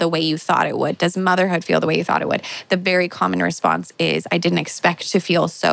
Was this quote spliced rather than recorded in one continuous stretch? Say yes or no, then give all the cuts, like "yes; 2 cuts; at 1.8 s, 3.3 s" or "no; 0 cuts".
no; 0 cuts